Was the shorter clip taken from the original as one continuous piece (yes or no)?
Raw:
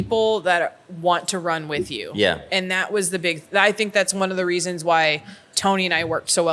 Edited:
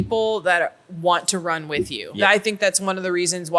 no